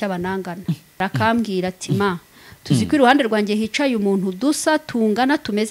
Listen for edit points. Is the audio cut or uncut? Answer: cut